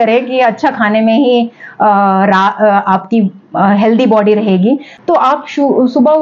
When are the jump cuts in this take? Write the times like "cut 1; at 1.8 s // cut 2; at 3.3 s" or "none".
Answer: cut 1; at 4.9 s